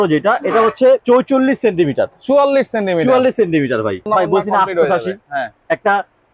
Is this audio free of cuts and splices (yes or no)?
no